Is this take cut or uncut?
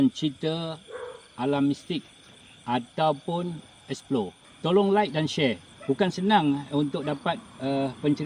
cut